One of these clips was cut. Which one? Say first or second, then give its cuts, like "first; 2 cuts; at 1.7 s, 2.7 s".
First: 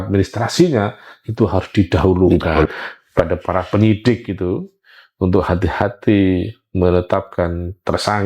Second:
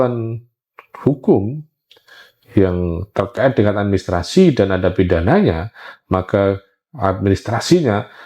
first; 1 cut; at 2.7 s